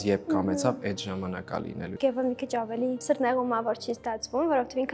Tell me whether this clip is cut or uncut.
cut